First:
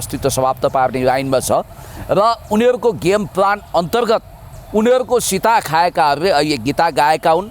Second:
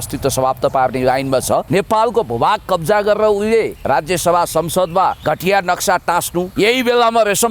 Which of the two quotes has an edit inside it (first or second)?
second